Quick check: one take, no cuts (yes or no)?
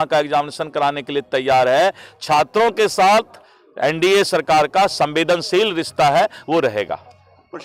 yes